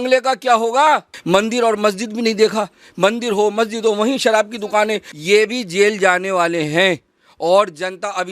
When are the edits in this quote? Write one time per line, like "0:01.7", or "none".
0:01.1
0:05.1